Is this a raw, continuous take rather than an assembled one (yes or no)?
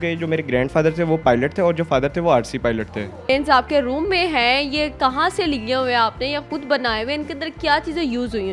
no